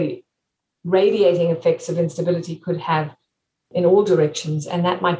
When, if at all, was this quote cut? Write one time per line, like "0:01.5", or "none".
0:03.6